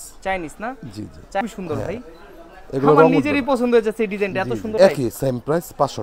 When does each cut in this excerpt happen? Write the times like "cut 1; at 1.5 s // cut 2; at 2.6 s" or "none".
cut 1; at 1.4 s // cut 2; at 4.8 s